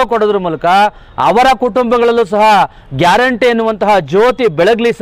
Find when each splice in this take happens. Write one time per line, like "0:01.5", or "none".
none